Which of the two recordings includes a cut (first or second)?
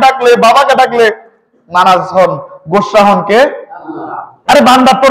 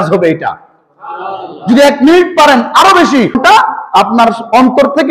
second